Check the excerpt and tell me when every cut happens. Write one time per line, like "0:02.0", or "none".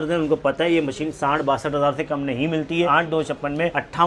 0:02.8

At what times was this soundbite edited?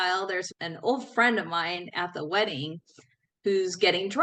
none

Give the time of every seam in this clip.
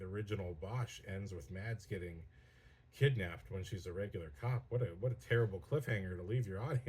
none

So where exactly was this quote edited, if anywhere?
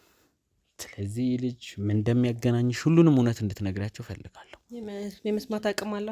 none

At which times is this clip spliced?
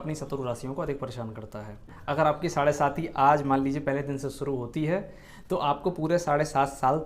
0:01.9

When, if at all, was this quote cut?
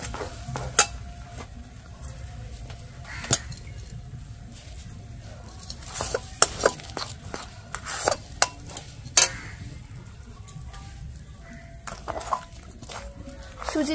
none

